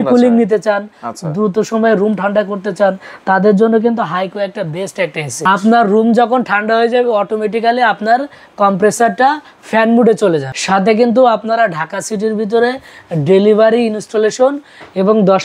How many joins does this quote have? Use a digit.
2